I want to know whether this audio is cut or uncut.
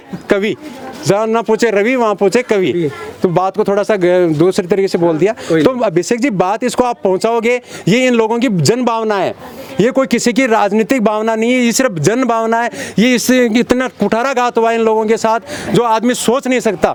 uncut